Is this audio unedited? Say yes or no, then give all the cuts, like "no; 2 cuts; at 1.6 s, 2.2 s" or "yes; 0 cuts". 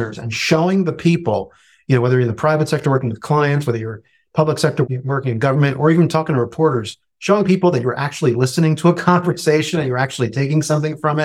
no; 1 cut; at 4.8 s